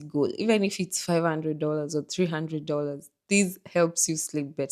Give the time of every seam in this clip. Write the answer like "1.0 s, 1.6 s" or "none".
none